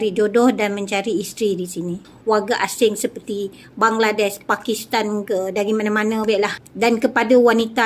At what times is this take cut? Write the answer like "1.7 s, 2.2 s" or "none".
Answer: 2.1 s, 6.6 s